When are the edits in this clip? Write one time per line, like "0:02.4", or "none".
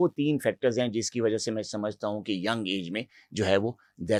none